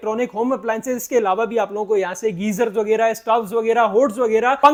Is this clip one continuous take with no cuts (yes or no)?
yes